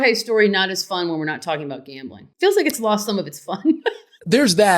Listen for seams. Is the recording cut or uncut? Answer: uncut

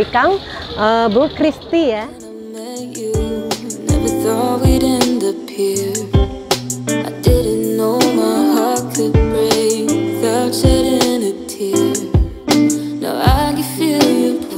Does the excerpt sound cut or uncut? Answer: uncut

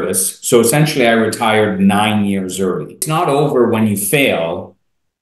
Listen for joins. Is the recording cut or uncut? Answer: cut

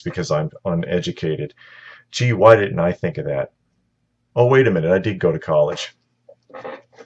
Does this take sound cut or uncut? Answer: cut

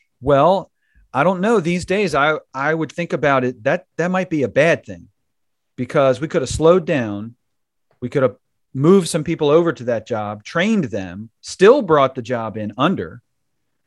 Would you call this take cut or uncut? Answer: uncut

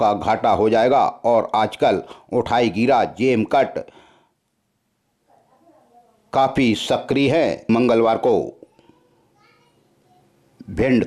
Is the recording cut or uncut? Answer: cut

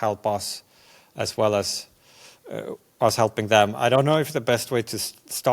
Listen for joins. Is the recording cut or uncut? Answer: uncut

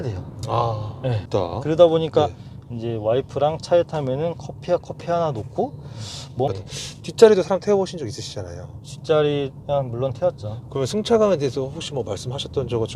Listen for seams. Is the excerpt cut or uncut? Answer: cut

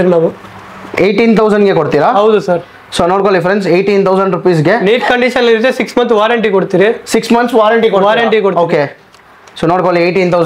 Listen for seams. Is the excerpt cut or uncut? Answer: uncut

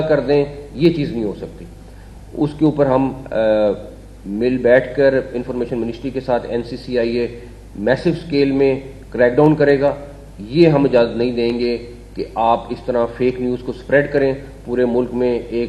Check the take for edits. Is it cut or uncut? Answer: uncut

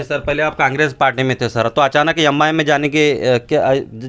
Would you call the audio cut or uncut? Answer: uncut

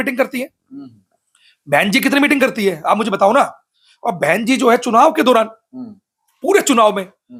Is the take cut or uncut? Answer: uncut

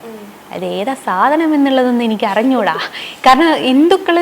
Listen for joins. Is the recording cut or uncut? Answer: uncut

